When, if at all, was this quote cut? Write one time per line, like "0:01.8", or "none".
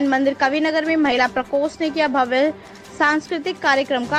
none